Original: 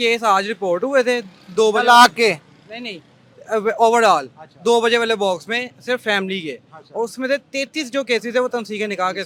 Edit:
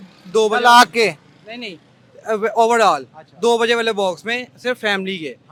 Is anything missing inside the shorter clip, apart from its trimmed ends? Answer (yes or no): no